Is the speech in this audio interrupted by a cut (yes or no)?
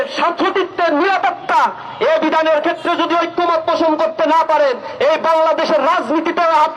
no